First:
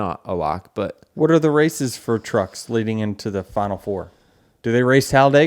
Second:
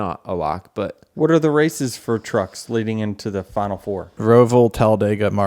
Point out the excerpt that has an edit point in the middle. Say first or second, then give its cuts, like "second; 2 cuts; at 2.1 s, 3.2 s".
second; 1 cut; at 4.2 s